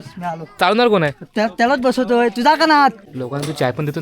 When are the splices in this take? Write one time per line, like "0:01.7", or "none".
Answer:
0:03.1